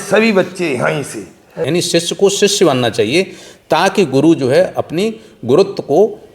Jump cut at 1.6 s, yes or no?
yes